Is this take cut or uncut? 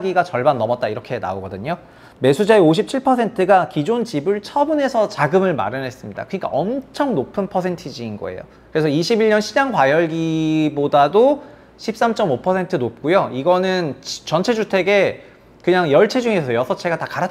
uncut